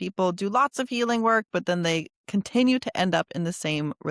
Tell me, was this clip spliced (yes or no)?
no